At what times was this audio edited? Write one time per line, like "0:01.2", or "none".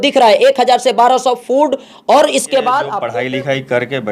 0:03.0